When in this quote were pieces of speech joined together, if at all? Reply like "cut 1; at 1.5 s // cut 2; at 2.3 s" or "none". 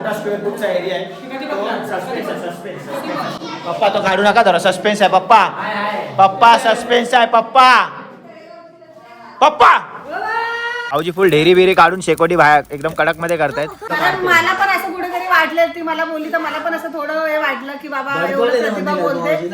cut 1; at 10.8 s // cut 2; at 13.8 s